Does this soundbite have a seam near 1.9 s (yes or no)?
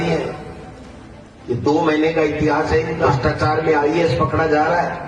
no